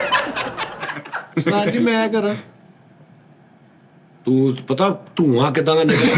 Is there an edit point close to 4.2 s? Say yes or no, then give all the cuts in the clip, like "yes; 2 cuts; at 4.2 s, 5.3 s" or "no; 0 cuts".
no; 1 cut; at 1.2 s